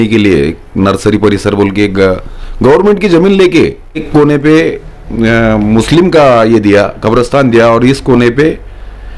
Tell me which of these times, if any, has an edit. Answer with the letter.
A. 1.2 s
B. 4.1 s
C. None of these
B